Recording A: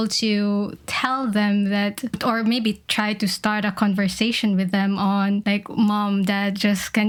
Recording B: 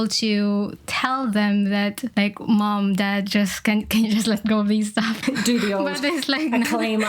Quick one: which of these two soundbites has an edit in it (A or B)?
B